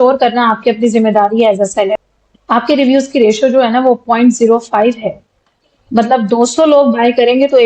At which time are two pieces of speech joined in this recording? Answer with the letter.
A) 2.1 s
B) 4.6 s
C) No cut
A